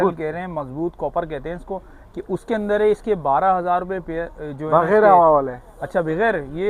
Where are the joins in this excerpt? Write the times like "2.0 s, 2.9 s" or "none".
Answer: none